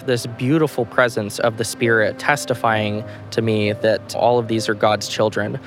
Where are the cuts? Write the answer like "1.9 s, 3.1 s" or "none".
2.2 s, 4.2 s

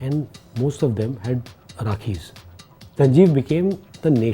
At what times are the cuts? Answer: 3.0 s

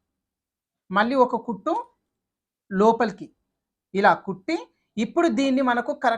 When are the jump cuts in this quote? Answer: none

